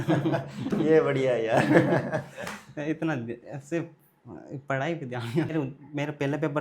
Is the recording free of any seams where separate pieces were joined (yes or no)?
no